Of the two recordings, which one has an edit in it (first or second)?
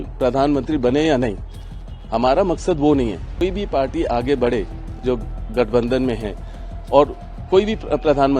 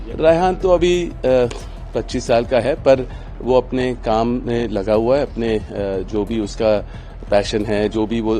first